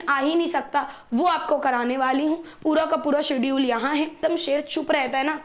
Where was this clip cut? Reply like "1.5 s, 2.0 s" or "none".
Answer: 4.2 s